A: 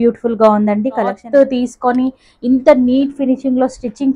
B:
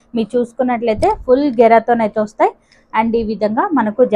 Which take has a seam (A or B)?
A